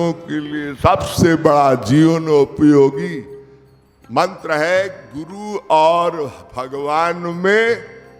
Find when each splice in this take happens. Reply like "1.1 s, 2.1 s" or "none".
none